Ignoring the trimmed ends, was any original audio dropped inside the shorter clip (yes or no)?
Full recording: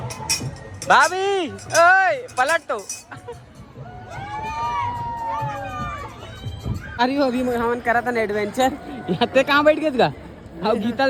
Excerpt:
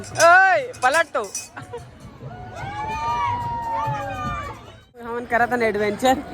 yes